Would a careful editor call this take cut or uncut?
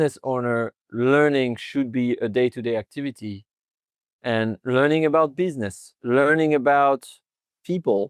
uncut